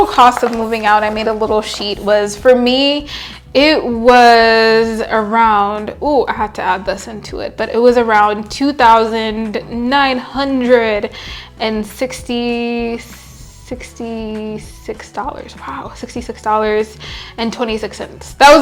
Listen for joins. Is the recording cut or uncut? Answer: uncut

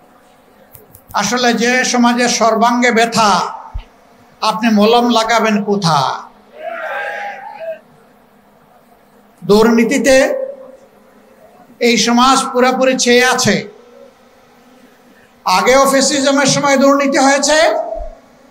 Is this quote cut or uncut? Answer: uncut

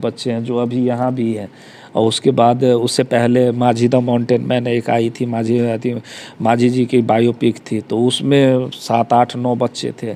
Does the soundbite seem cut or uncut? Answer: uncut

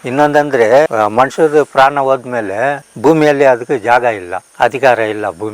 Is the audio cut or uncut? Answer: cut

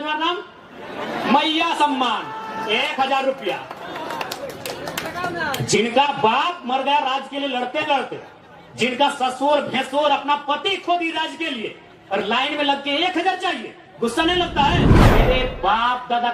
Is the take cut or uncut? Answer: cut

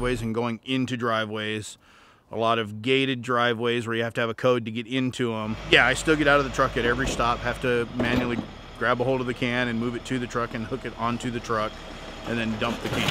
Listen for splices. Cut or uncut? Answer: uncut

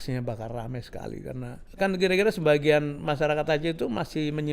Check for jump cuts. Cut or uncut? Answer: cut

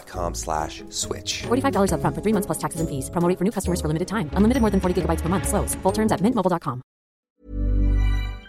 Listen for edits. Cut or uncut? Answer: cut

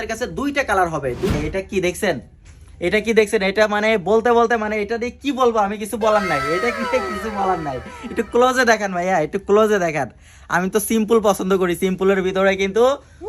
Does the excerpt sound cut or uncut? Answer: cut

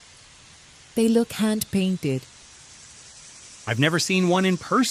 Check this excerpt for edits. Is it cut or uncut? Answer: cut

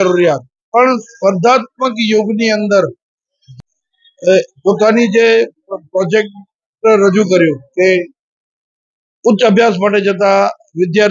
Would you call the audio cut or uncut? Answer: cut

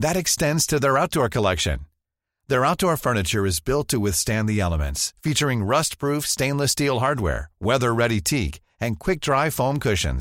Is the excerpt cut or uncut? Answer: uncut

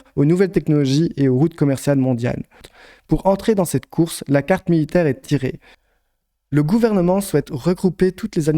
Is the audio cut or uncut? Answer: cut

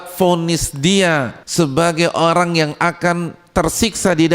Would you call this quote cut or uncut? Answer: cut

